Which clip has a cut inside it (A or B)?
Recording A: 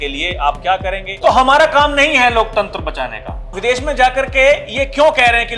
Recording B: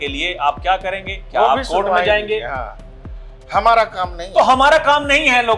A